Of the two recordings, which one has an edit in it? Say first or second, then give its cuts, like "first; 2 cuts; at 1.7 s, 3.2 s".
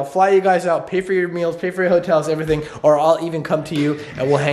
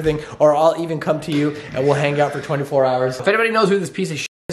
second; 1 cut; at 3.2 s